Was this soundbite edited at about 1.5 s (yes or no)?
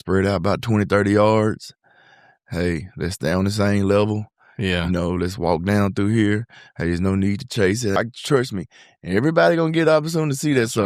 no